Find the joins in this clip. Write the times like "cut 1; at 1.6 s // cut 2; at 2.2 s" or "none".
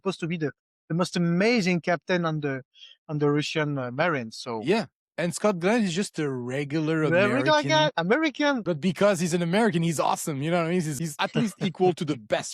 cut 1; at 8.6 s // cut 2; at 11.2 s